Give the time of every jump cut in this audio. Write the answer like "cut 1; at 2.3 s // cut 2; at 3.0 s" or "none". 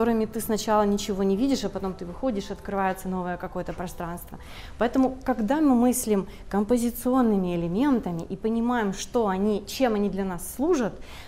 none